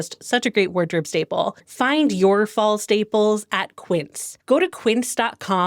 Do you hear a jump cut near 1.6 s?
yes; 1 cut; at 1.6 s

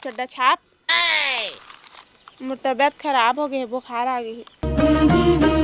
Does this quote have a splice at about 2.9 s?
no; 1 cut; at 4.4 s

